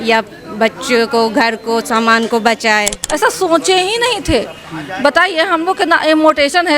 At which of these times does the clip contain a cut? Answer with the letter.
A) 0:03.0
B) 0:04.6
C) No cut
A